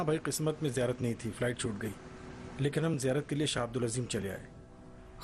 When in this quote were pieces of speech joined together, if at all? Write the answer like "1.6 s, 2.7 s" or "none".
3.5 s